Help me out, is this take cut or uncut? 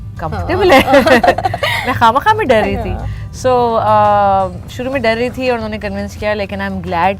uncut